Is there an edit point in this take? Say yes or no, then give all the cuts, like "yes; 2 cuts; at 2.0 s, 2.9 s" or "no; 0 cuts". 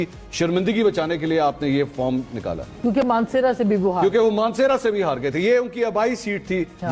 no; 0 cuts